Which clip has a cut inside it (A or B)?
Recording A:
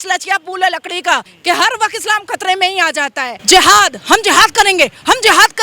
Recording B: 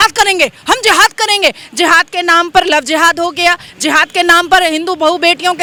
A